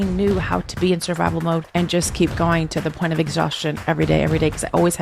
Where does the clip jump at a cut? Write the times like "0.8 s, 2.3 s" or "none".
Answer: 1.7 s